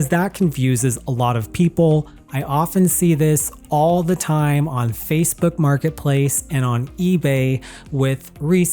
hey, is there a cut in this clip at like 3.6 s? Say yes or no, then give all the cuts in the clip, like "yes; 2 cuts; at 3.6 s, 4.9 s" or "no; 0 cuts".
no; 1 cut; at 2.2 s